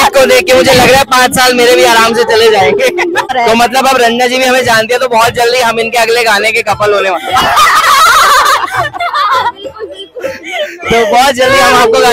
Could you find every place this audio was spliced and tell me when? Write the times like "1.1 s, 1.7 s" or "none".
3.3 s